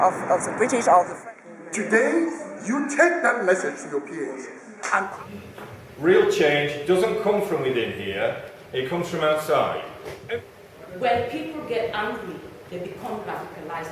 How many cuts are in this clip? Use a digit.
3